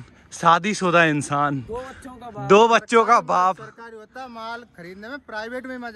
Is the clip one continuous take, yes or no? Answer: yes